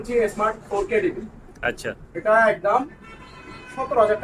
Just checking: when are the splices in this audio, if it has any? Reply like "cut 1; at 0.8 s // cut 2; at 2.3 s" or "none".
none